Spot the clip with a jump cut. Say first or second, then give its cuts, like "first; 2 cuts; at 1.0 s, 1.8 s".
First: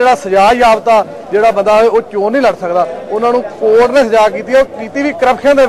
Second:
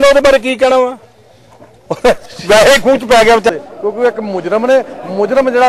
second; 1 cut; at 3.5 s